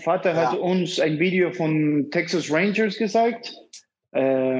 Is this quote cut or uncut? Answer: uncut